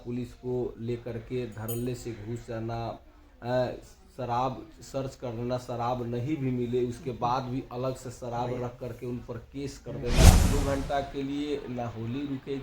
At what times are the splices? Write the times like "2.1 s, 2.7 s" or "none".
10.4 s